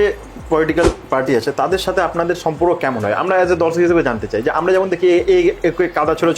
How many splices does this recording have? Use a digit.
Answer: 0